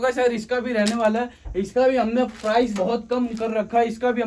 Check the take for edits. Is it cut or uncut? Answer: uncut